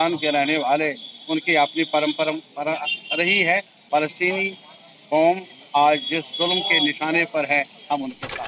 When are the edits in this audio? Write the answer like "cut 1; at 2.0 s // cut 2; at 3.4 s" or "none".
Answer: cut 1; at 3.7 s